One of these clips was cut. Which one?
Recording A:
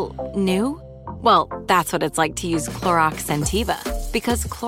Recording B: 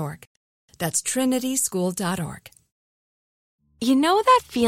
B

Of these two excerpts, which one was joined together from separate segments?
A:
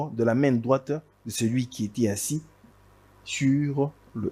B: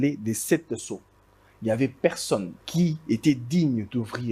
B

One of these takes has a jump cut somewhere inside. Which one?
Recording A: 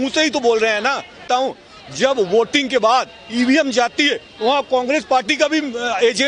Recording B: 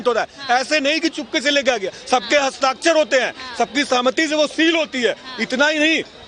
A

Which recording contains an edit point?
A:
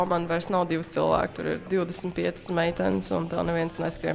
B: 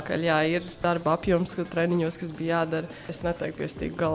B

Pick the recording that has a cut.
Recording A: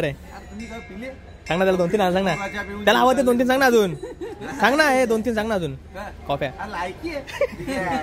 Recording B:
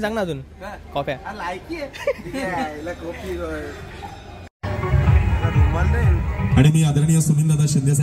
B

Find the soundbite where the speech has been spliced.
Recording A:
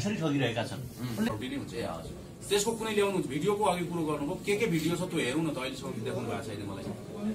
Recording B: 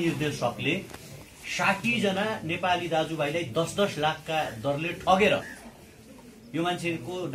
A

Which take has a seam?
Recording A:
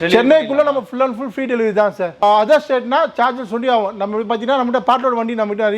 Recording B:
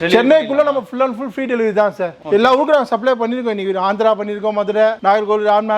B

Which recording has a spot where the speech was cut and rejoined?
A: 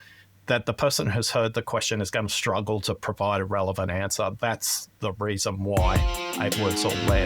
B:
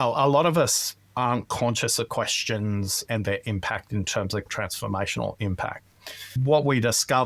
B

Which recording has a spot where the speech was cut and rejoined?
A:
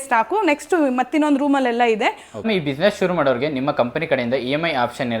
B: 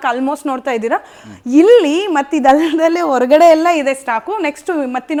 A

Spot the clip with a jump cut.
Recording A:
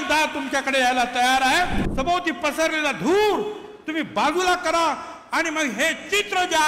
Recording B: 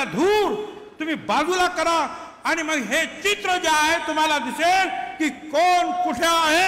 A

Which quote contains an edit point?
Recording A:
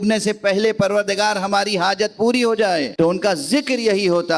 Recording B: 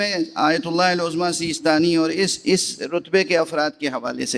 A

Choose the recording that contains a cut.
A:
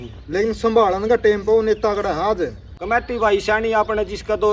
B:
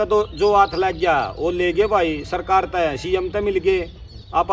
A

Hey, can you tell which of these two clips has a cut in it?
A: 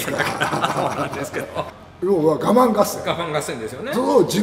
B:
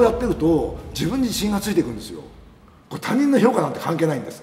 A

